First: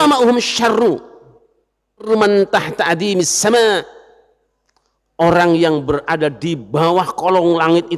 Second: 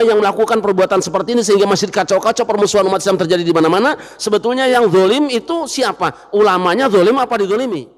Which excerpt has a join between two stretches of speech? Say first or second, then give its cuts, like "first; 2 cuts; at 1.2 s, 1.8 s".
first; 1 cut; at 2.0 s